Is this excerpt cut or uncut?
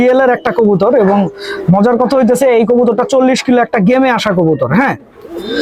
uncut